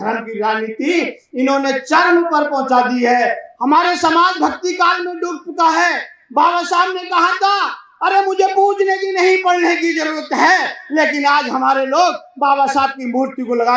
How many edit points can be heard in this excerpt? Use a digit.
1